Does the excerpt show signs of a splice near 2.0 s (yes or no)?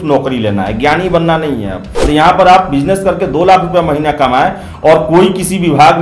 yes